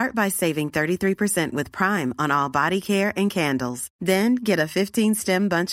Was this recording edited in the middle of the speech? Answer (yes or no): no